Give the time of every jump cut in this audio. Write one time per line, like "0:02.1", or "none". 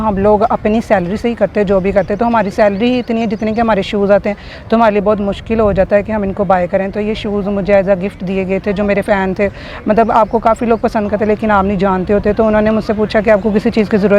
none